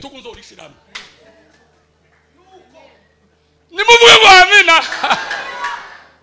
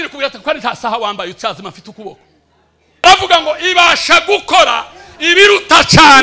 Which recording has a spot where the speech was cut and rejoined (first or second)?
second